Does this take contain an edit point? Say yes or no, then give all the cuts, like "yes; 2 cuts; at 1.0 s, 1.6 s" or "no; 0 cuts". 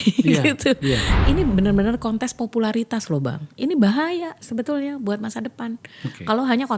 yes; 1 cut; at 1.1 s